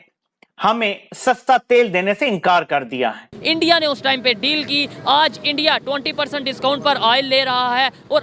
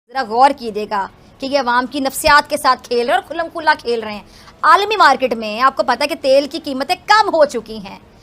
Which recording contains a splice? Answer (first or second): first